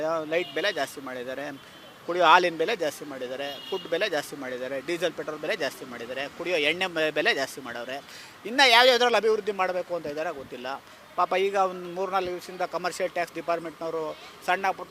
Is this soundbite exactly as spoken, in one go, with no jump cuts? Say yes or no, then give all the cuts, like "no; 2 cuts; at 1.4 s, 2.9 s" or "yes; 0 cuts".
yes; 0 cuts